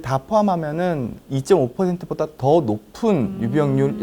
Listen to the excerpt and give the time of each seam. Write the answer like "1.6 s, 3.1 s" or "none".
1.2 s